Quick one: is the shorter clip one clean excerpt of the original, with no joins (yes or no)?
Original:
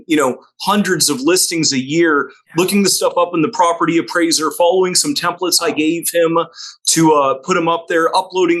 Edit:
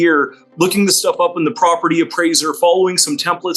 yes